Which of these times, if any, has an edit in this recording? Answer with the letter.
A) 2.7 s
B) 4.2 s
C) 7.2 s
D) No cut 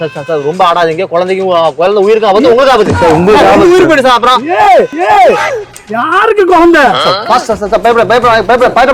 C